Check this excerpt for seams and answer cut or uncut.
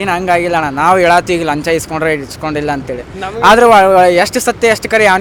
uncut